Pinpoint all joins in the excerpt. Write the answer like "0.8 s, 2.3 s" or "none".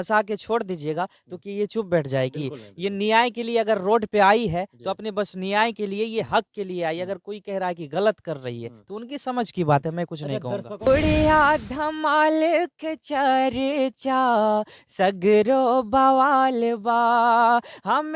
10.9 s